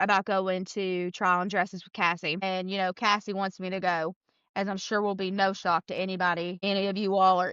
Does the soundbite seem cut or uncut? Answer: cut